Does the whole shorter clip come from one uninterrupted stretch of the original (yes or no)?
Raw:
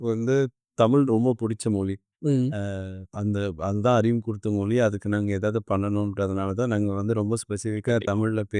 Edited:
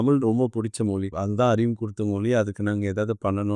no